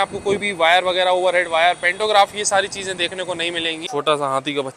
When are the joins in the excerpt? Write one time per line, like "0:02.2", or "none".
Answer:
0:03.8